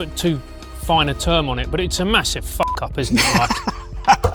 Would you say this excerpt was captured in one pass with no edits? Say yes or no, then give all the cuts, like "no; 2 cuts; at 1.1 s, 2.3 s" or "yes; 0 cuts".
yes; 0 cuts